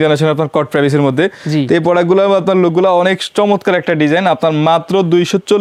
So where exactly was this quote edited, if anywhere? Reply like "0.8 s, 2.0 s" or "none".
none

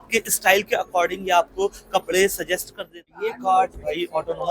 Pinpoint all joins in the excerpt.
3.1 s

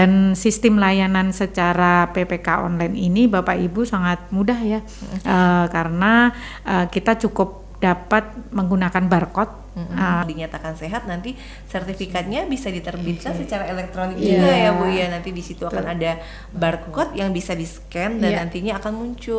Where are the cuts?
10.2 s

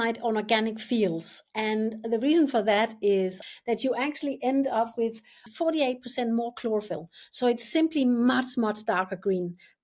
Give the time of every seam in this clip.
3.5 s, 5.4 s

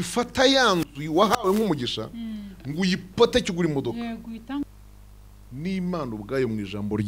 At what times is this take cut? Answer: 4.6 s

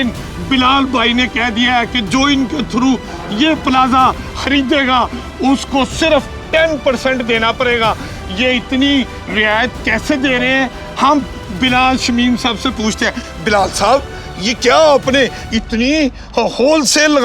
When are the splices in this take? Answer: none

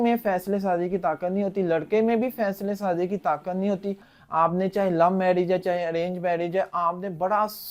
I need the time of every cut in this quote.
4.1 s

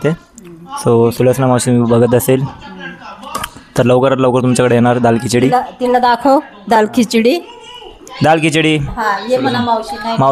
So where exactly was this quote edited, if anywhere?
none

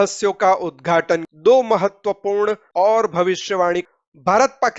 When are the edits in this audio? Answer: 1.3 s, 2.6 s, 3.8 s

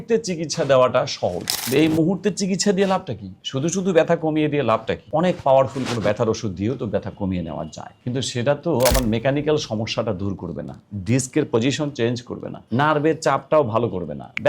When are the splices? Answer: none

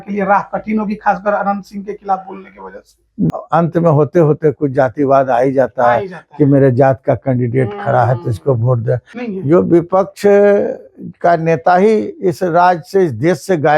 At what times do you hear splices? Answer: 3.3 s, 9.1 s

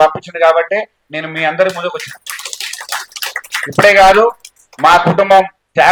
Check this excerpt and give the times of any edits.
none

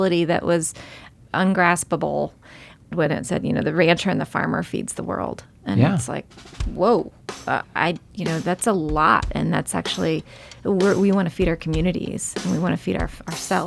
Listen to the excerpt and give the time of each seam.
1.1 s, 2.9 s, 7.6 s

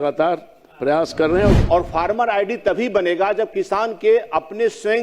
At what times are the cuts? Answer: 1.6 s

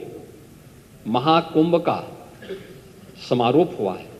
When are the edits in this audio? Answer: none

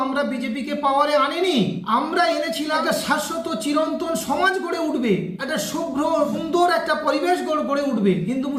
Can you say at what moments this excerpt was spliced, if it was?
none

